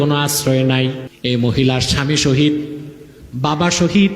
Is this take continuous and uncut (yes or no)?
no